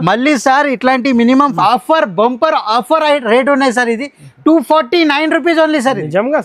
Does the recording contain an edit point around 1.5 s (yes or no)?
yes